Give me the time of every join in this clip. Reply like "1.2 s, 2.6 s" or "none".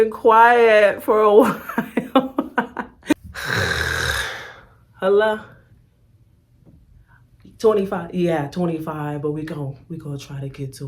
3.1 s